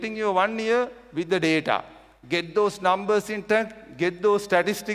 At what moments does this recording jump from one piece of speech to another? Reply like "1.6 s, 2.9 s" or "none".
none

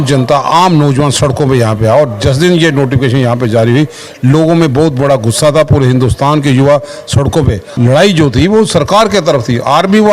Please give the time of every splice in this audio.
7.6 s

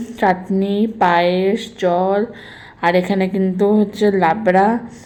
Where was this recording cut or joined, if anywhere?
none

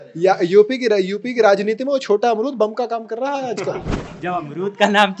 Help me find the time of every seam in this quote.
4.0 s

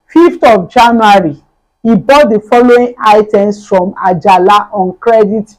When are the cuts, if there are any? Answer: none

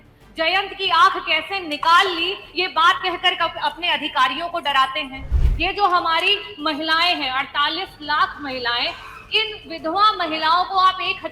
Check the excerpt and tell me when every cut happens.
5.3 s

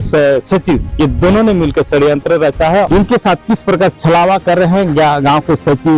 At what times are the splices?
2.9 s

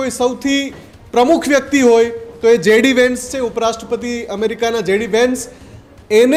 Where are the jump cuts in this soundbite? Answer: none

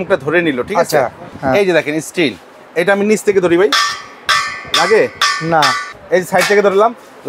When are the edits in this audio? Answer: 1.2 s, 5.9 s

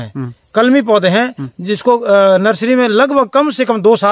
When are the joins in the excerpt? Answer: none

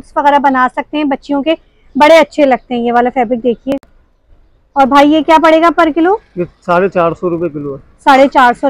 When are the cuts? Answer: none

